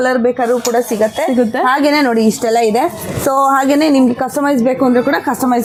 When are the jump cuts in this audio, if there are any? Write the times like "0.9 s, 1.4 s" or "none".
none